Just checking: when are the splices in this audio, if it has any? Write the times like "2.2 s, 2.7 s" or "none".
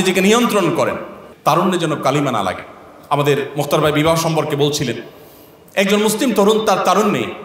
1.2 s